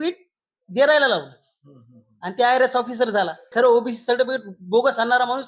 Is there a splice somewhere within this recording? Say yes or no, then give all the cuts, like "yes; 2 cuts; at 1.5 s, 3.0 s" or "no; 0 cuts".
yes; 1 cut; at 3.5 s